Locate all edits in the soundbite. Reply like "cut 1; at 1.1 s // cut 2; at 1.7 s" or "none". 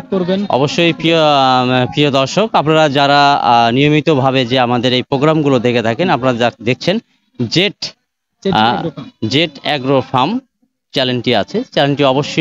none